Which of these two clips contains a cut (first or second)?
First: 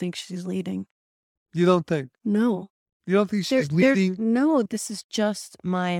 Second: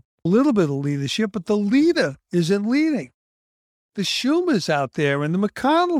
first